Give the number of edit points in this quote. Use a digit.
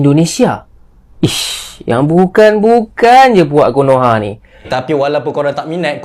1